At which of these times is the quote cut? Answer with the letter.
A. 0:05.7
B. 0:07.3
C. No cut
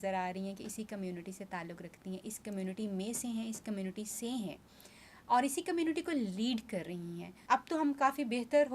B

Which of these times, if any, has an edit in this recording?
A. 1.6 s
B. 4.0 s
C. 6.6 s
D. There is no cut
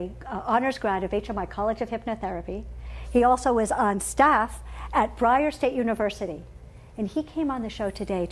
D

